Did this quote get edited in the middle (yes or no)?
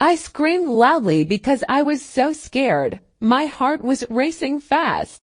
yes